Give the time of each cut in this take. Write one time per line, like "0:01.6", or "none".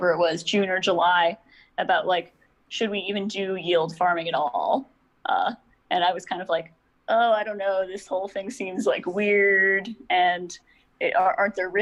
none